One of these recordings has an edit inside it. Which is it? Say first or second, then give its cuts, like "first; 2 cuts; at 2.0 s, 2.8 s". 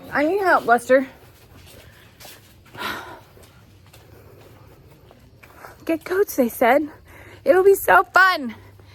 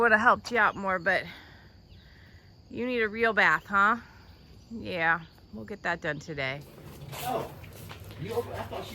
second; 1 cut; at 7.1 s